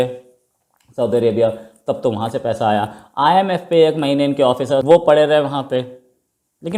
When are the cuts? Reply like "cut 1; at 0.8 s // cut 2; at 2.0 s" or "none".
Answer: none